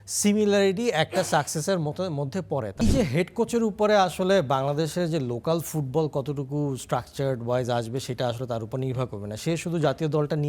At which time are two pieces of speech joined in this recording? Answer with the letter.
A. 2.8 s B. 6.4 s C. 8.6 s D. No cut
A